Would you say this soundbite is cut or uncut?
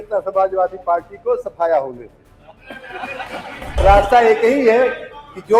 cut